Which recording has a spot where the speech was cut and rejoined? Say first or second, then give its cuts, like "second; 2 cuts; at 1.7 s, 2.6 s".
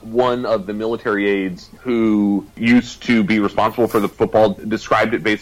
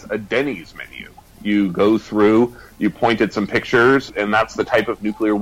first; 3 cuts; at 1.7 s, 2.5 s, 4.1 s